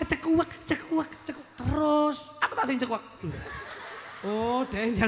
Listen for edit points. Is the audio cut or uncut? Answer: uncut